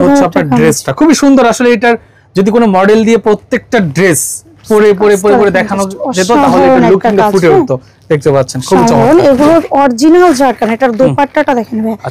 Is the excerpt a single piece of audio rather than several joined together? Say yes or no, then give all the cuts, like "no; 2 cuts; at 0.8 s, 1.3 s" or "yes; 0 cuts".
yes; 0 cuts